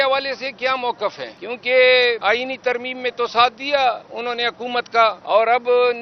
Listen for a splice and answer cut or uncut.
cut